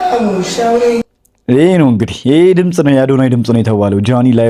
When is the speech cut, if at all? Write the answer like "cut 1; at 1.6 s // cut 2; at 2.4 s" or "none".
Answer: cut 1; at 1.0 s